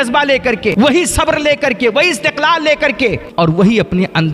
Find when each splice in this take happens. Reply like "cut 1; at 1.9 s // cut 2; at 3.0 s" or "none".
cut 1; at 0.7 s // cut 2; at 3.2 s